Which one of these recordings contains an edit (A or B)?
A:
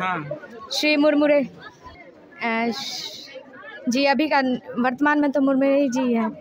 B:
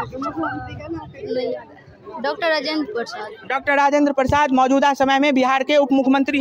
A